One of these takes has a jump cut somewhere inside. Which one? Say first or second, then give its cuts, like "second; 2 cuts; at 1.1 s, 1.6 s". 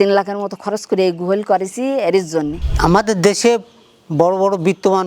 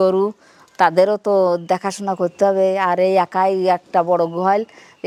first; 1 cut; at 2.6 s